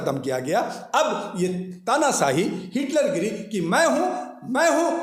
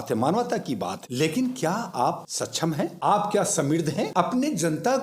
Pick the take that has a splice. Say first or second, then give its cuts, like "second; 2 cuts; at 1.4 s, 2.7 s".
second; 3 cuts; at 1.0 s, 2.6 s, 4.1 s